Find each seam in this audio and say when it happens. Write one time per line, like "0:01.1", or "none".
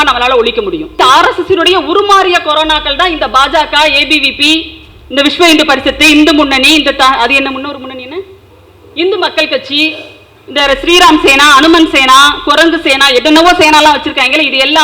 0:01.0